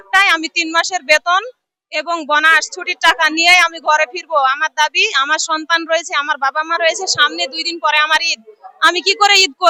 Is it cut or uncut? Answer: uncut